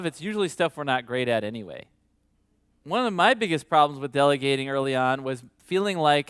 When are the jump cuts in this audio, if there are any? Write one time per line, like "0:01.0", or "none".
0:02.7